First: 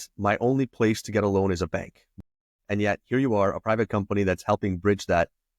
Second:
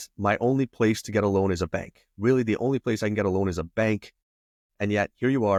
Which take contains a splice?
first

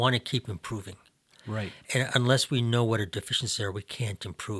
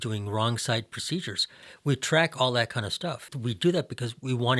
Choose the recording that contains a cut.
second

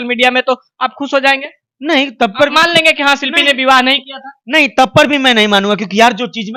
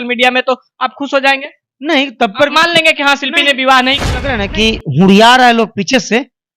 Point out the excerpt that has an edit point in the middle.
second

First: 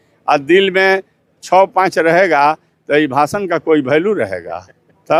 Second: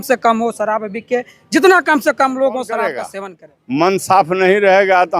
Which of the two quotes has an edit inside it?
second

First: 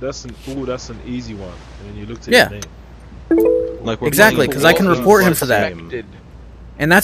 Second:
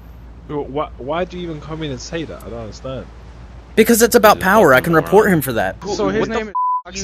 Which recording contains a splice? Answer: second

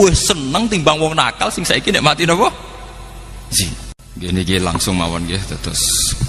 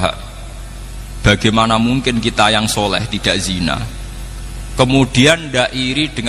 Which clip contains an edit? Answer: first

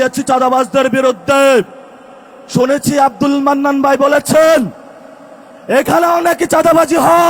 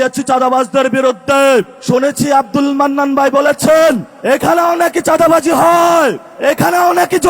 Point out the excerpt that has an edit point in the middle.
second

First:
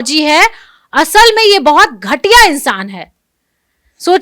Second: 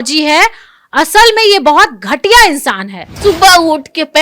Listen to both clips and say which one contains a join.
second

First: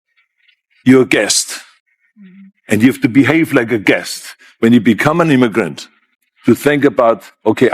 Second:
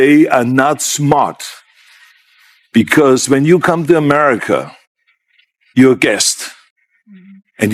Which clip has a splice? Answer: first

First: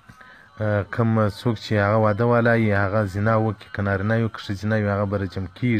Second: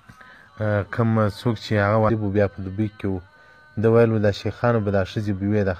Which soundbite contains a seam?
first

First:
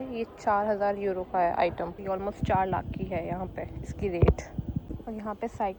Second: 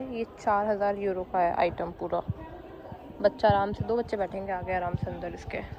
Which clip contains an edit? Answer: first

